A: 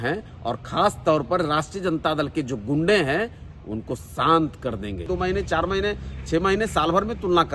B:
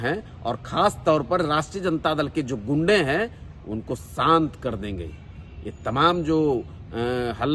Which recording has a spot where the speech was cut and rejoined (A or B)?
A